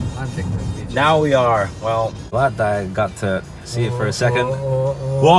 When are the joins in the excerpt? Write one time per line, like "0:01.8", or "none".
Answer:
0:02.2